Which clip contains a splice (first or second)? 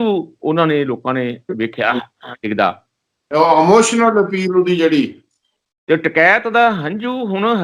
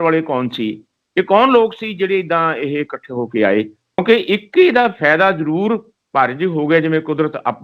second